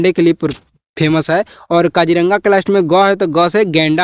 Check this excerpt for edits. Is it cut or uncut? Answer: uncut